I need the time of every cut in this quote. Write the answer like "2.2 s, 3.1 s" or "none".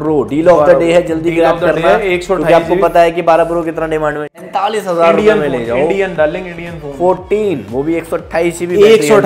4.3 s